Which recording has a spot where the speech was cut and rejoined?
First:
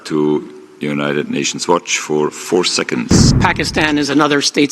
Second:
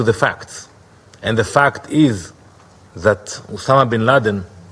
first; 1 cut; at 3.3 s

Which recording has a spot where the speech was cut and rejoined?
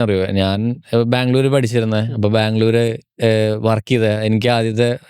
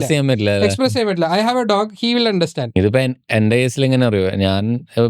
second; 1 cut; at 2.7 s

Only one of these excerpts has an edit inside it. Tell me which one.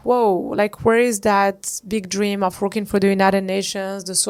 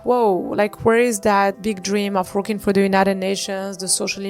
second; 1 cut; at 1.6 s

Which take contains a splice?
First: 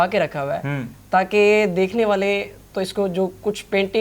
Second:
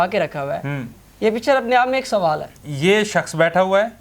second; 2 cuts; at 0.9 s, 2.6 s

